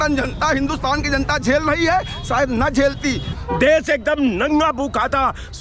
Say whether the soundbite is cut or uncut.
cut